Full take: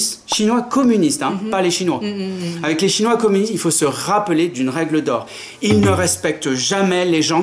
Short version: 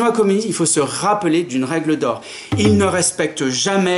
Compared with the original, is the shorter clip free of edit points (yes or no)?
yes